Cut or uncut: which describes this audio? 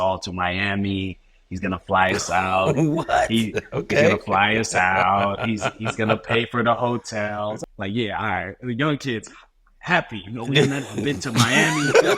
cut